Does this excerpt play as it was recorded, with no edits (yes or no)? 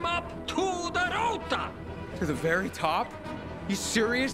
yes